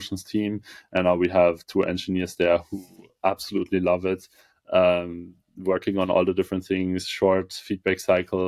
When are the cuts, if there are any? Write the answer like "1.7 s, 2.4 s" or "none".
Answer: none